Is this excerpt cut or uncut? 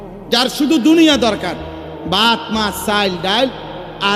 uncut